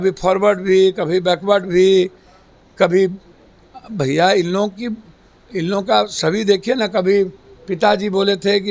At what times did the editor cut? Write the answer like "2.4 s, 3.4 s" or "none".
none